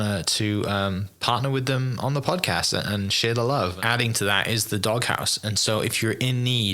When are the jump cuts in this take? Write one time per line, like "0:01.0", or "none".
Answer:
0:03.8